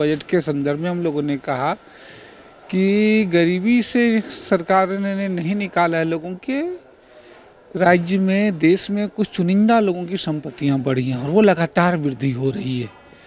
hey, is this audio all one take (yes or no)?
yes